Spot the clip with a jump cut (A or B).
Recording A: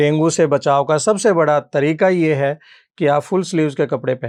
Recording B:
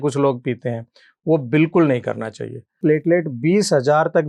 B